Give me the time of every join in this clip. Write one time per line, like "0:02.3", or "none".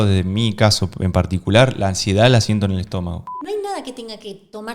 0:03.3